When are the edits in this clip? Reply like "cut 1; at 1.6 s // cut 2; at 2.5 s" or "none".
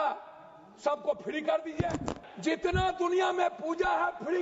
cut 1; at 2.3 s